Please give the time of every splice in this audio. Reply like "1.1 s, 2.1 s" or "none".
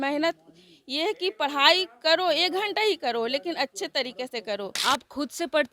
4.7 s